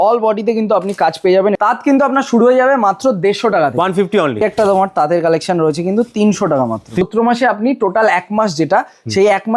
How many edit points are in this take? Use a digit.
3